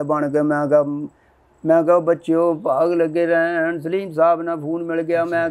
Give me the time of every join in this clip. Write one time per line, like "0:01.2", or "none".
none